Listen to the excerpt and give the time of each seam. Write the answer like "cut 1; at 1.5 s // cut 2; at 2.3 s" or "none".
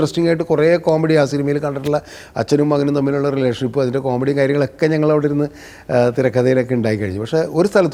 none